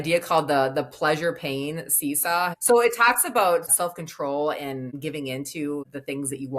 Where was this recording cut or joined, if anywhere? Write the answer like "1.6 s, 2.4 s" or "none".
2.5 s, 3.7 s